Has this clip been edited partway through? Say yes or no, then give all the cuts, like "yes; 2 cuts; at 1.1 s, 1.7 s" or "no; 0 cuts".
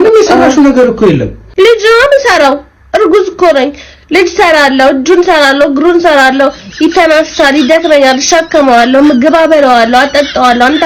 no; 0 cuts